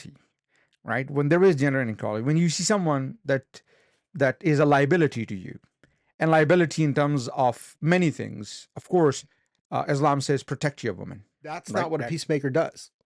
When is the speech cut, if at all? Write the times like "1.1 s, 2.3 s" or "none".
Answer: 11.7 s